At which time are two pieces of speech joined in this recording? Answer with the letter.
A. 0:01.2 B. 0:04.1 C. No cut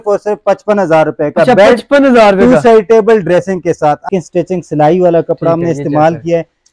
B